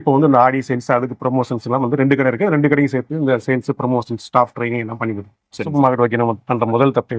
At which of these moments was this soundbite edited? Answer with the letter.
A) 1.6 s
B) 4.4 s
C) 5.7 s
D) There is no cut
C